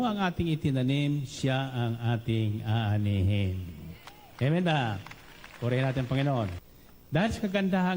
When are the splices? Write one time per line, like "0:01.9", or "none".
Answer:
0:06.6